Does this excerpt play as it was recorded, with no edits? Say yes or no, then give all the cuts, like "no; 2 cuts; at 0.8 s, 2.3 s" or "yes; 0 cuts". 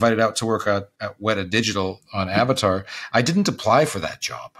no; 2 cuts; at 0.9 s, 2.0 s